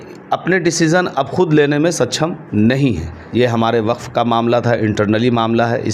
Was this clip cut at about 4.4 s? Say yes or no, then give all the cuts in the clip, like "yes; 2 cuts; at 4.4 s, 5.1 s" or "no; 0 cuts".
no; 1 cut; at 3.1 s